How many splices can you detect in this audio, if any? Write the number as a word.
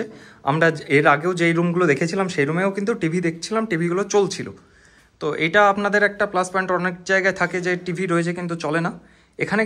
zero